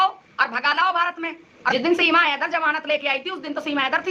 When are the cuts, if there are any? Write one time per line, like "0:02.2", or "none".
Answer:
0:01.7

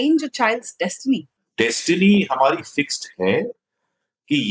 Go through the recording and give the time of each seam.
0:01.4

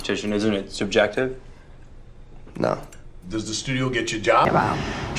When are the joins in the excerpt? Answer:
none

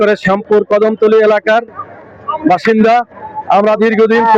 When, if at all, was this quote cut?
none

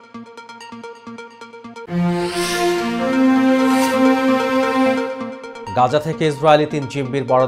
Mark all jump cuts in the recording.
0:01.0

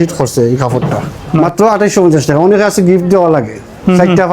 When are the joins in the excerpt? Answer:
0:01.4

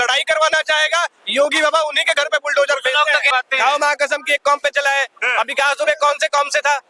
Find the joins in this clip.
0:03.3

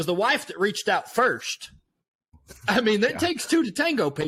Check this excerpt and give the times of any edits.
none

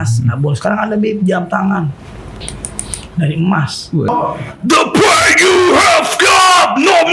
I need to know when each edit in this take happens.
0:04.1

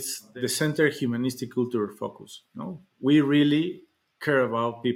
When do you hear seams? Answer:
none

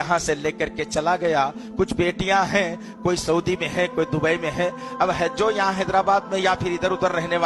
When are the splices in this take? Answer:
none

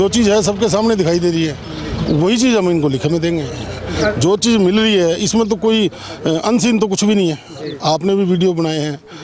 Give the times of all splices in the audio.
none

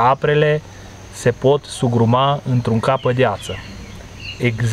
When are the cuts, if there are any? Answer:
none

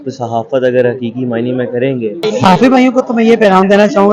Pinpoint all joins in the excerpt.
0:02.2

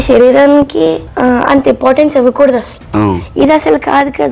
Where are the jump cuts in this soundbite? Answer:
0:01.1
0:02.8

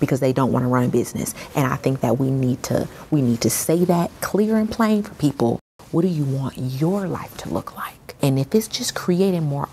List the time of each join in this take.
0:05.7
0:08.2

